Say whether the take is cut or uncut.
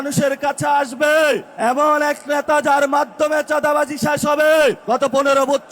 cut